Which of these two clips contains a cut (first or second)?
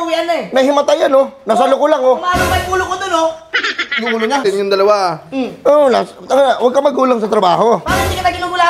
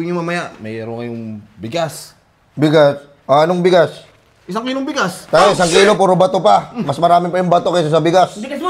first